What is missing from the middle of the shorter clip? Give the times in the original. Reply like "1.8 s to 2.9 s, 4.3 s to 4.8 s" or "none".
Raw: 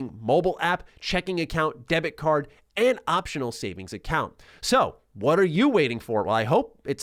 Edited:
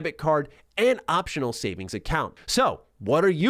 4.4 s to 4.5 s